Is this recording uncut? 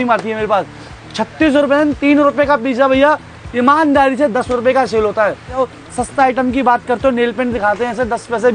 no; 1 cut; at 5.6 s

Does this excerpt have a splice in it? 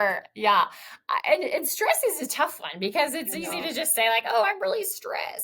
no; 0 cuts

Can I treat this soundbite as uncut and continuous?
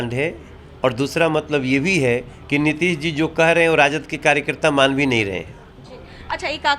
yes; 0 cuts

